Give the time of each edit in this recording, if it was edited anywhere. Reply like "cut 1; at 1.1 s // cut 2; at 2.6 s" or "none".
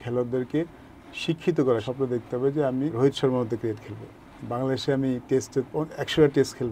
cut 1; at 1.8 s // cut 2; at 2.9 s